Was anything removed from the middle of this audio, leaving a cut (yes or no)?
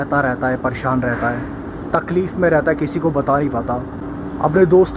yes